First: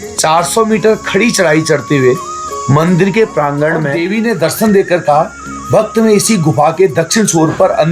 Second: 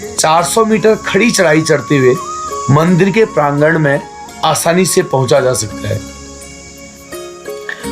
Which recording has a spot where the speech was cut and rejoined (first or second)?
first